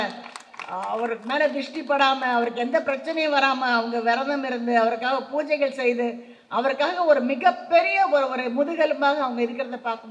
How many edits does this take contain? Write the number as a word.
zero